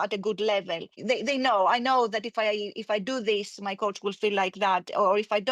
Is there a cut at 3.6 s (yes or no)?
no